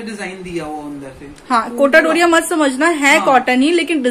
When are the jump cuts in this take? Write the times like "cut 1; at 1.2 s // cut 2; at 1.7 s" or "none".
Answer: none